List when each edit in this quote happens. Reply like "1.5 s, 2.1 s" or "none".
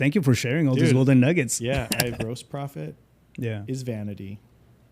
2.2 s